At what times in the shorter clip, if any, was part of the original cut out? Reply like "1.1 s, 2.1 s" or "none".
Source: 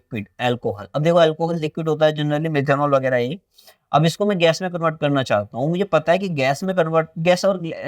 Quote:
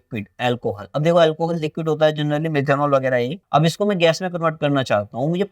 3.4 s

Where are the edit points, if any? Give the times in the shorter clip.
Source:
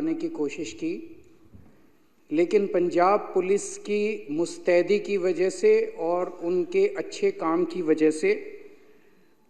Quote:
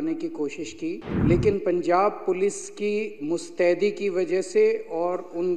1.1 s

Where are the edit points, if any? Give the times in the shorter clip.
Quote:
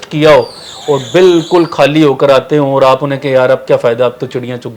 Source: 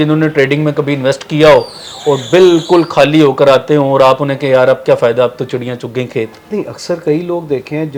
none

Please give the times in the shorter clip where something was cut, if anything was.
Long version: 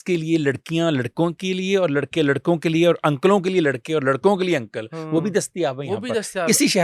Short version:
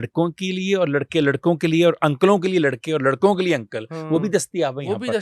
none

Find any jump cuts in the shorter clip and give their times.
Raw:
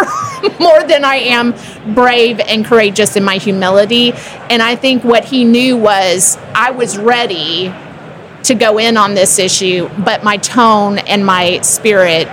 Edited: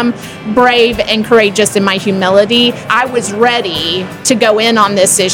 2.8 s, 4.1 s

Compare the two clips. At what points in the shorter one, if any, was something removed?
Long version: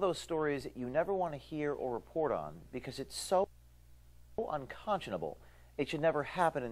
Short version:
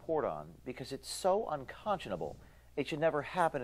1.4 s

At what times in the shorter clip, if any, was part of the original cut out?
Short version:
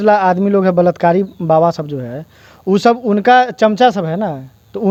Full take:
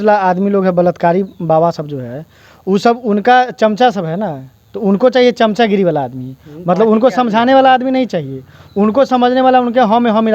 none

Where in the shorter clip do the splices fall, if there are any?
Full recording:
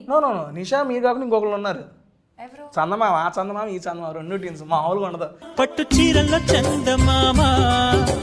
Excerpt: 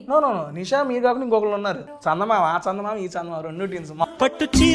1.9 s, 4.0 s

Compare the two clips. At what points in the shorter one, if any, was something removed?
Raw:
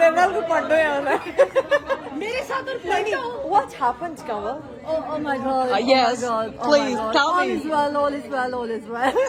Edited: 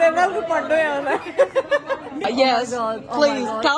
2.2 s

